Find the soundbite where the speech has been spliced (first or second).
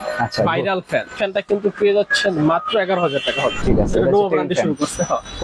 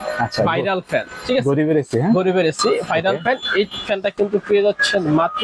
first